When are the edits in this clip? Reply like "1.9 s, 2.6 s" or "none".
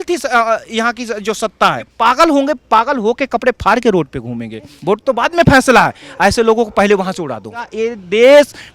1.9 s, 4.7 s, 7.8 s